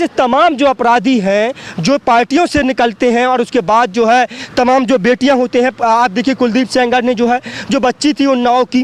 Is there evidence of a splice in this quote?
no; 0 cuts

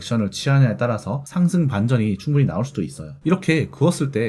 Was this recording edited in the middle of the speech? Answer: yes; 1 cut; at 3.1 s

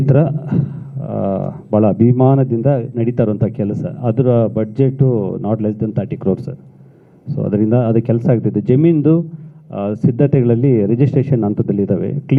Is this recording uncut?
yes; 0 cuts

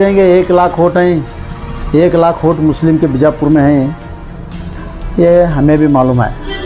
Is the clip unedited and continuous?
yes; 0 cuts

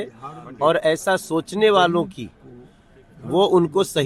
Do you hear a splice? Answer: no; 0 cuts

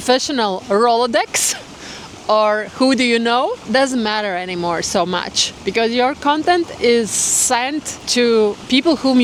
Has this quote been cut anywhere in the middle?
no; 0 cuts

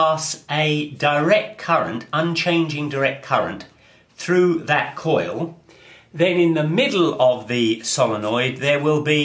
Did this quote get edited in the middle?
no; 0 cuts

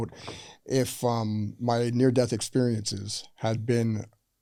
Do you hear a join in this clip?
no; 0 cuts

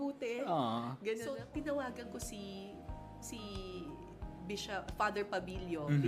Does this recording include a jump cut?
yes; 1 cut; at 1.4 s

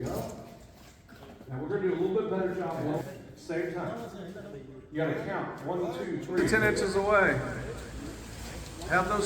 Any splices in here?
yes; 2 cuts; at 3.0 s, 6.8 s

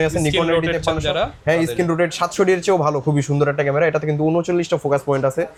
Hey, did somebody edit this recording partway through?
no; 0 cuts

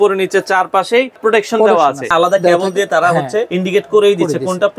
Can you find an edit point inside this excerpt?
yes; 3 cuts; at 1.1 s, 2.1 s, 3.5 s

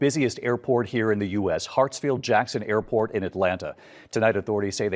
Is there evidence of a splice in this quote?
no; 0 cuts

